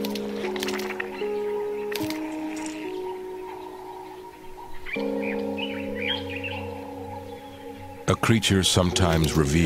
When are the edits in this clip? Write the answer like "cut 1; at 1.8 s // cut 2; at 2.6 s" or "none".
cut 1; at 5.1 s